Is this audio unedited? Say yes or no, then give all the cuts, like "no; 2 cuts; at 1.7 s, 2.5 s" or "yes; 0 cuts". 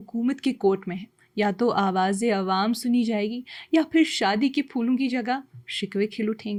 yes; 0 cuts